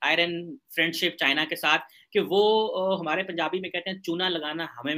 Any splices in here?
no; 0 cuts

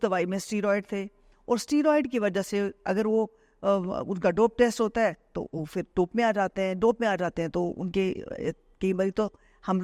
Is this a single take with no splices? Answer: yes; 0 cuts

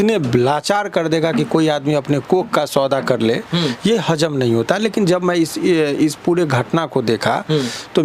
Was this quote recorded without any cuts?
yes; 0 cuts

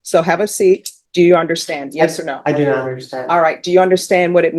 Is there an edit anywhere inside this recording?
yes; 1 cut; at 1.0 s

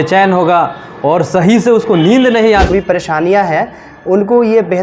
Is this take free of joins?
no; 1 cut; at 2.7 s

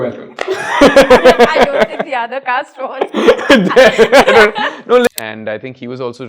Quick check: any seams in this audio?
yes; 1 cut; at 5.1 s

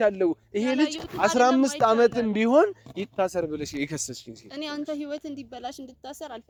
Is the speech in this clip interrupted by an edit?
no; 0 cuts

